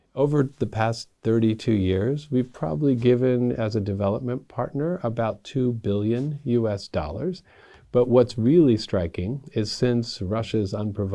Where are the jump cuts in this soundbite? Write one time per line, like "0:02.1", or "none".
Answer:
none